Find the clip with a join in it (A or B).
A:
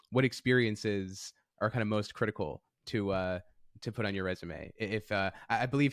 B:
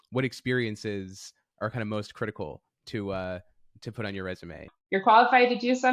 B